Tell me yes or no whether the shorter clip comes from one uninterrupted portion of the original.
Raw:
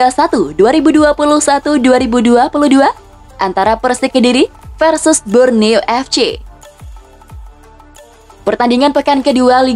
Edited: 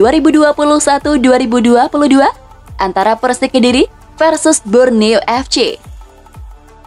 no